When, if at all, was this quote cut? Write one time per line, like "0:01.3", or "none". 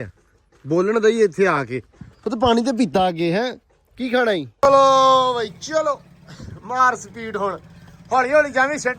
0:04.5